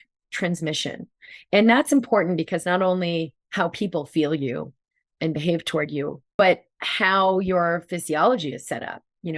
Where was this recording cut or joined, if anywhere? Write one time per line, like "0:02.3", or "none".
0:06.2